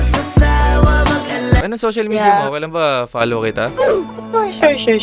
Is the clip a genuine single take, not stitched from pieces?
no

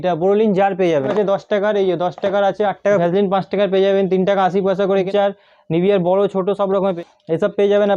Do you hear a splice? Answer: yes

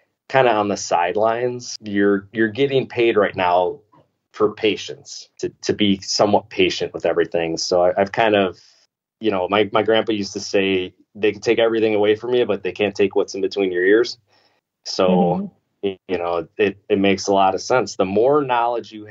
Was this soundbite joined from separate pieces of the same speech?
yes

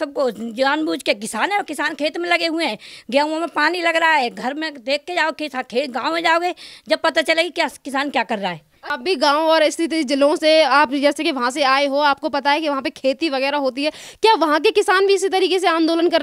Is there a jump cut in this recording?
no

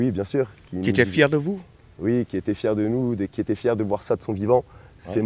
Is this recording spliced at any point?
no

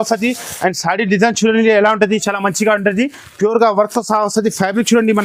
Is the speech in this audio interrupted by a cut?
no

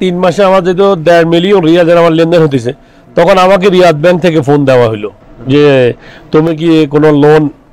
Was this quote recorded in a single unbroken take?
yes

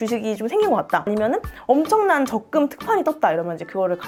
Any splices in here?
no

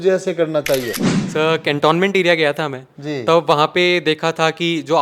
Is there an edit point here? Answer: yes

